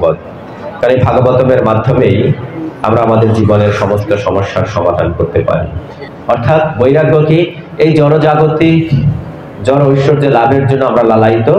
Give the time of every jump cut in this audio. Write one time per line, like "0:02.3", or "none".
0:06.1

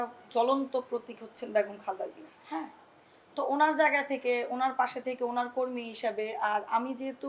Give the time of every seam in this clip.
none

